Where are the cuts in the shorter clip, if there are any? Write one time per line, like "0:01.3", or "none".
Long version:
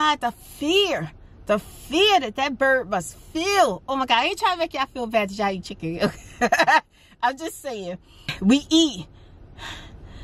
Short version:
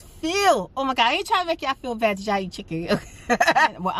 none